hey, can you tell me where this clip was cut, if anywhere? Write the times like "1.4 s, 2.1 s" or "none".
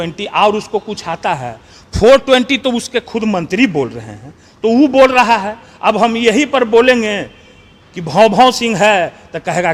none